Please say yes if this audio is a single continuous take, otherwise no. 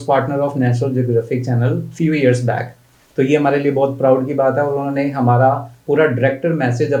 yes